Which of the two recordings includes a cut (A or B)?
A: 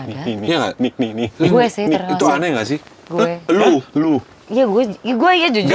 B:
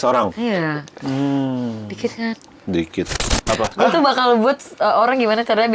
B